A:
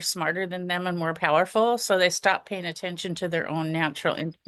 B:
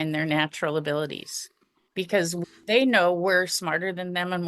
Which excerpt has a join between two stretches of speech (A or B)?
B